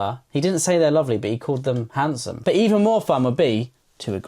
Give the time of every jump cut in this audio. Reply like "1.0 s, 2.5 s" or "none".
2.3 s